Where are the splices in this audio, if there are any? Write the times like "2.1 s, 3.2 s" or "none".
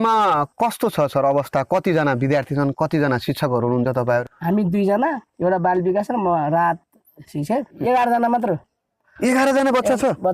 5.3 s, 7.8 s